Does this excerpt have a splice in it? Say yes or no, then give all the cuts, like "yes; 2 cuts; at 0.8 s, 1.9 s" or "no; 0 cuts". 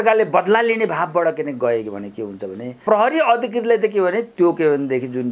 yes; 1 cut; at 2.8 s